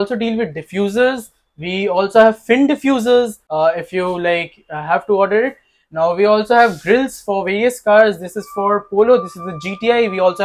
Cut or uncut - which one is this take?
cut